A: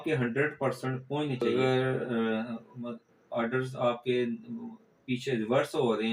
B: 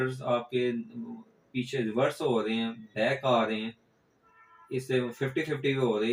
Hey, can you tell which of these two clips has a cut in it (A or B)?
A